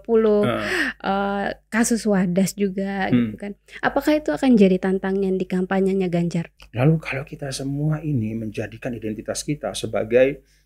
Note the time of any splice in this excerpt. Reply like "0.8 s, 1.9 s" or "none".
6.6 s